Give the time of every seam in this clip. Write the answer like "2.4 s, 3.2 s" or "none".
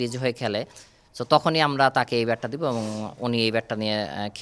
none